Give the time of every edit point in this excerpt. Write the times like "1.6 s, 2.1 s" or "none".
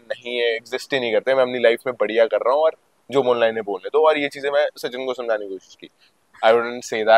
6.1 s